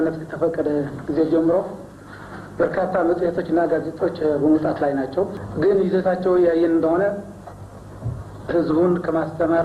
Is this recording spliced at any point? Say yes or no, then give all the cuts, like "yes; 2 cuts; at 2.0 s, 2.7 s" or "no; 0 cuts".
yes; 1 cut; at 5.4 s